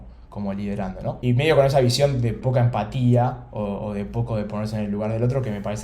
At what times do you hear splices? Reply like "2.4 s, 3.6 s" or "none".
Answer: 1.2 s, 2.4 s